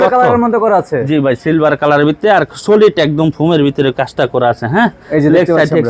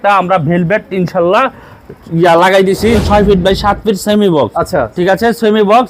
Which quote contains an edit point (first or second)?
second